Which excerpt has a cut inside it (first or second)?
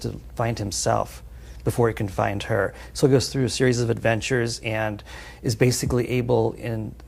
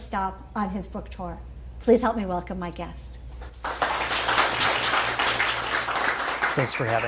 first